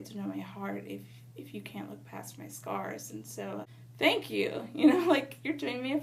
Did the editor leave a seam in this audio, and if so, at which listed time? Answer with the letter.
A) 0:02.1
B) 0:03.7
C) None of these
B